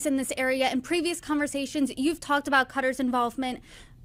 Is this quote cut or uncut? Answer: uncut